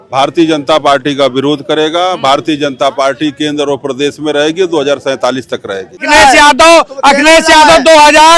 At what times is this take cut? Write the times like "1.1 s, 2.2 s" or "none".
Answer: 6.0 s

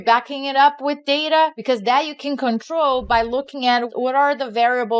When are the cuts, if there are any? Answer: 1.6 s, 3.9 s

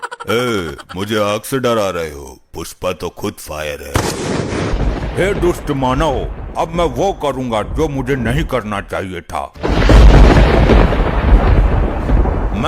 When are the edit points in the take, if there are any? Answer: 4.7 s, 9.5 s

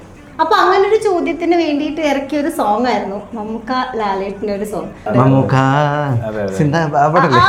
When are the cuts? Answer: 5.1 s

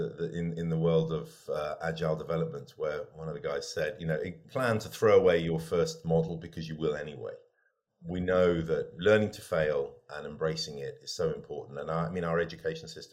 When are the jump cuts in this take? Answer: 4.4 s, 7.9 s, 8.9 s

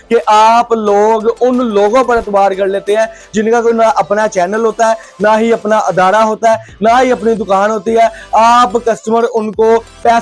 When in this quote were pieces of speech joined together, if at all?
none

